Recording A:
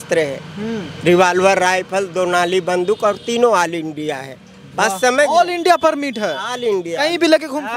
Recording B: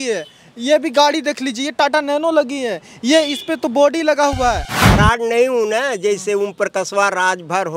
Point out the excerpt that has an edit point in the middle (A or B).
B